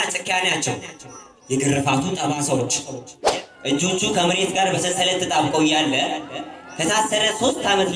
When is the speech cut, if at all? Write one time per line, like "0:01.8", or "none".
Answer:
0:03.2